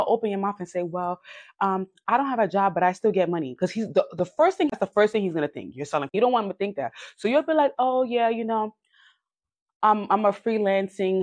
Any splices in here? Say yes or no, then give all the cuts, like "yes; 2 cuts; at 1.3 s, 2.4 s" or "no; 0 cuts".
yes; 2 cuts; at 4.8 s, 6.1 s